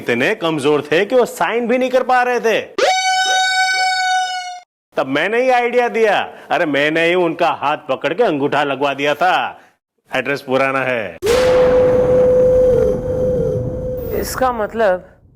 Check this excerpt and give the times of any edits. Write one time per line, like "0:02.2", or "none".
none